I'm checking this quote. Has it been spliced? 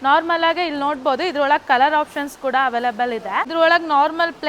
yes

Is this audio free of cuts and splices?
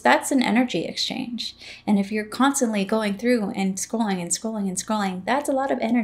yes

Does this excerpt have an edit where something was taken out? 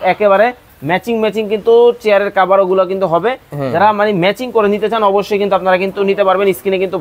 no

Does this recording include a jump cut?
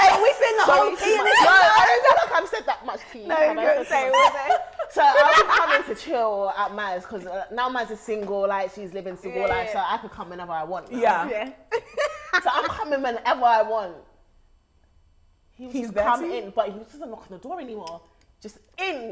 no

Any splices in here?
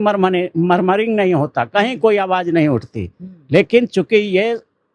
no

